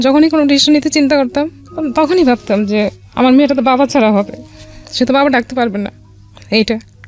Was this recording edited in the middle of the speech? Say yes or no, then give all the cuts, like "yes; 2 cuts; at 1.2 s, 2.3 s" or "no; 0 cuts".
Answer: no; 0 cuts